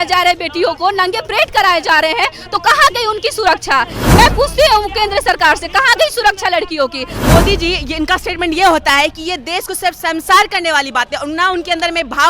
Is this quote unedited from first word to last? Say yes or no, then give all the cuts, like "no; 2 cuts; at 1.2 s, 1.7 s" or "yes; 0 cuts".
no; 2 cuts; at 4.0 s, 7.1 s